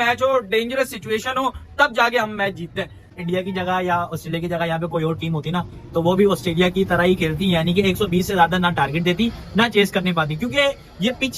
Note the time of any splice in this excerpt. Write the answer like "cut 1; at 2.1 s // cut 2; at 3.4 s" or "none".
cut 1; at 3.1 s